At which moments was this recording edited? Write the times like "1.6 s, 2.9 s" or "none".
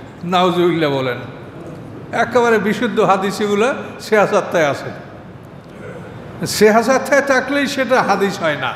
none

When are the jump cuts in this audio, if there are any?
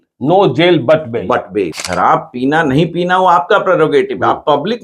1.7 s

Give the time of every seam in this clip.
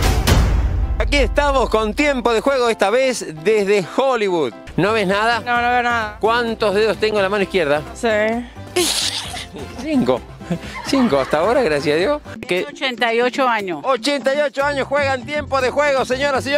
1.1 s, 4.6 s, 12.4 s

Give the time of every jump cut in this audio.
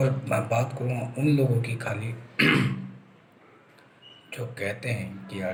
none

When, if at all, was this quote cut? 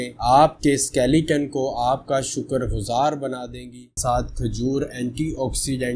4.0 s

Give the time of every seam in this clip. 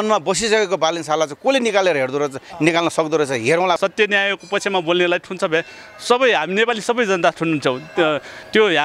3.8 s

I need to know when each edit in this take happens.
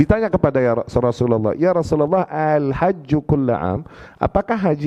none

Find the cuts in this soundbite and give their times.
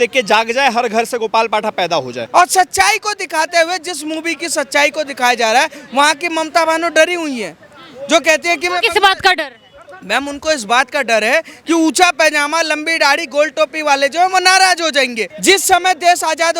2.2 s, 15.3 s

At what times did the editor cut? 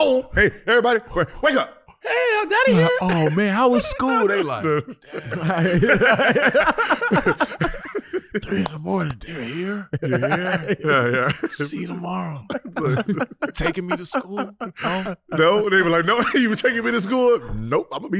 none

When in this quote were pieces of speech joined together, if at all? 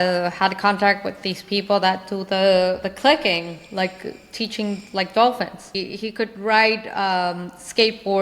5.8 s

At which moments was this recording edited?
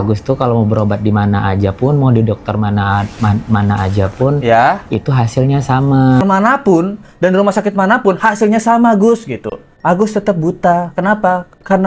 6.2 s

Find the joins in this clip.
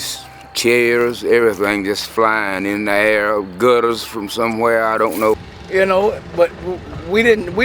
5.4 s

